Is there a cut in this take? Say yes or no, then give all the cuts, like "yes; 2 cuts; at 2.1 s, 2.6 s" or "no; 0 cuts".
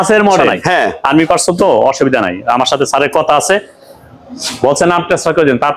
yes; 1 cut; at 1.0 s